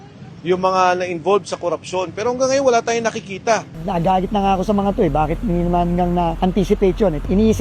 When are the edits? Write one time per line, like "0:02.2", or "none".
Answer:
0:03.8